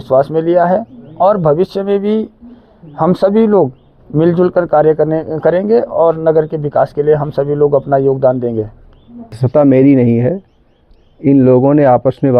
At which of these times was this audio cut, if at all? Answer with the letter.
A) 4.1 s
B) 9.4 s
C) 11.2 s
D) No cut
B